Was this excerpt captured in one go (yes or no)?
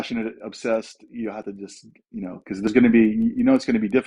yes